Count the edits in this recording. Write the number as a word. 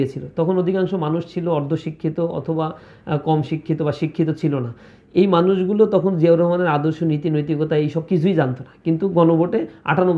zero